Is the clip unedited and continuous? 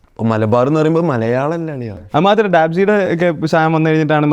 no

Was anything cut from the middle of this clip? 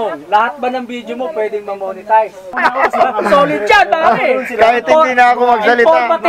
yes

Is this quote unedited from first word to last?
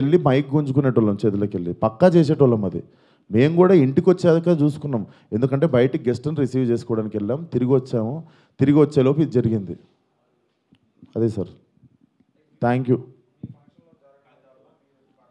yes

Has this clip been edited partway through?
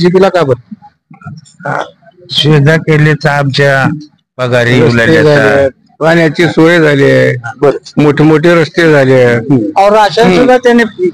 no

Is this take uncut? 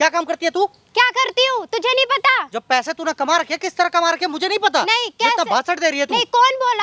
yes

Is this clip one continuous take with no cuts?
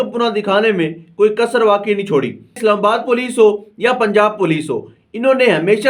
no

